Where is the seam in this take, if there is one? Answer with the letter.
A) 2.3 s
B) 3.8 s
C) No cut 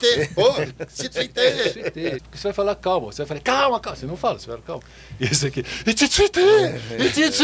A